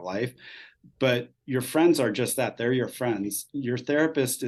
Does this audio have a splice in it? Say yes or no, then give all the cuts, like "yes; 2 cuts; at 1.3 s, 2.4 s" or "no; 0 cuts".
no; 0 cuts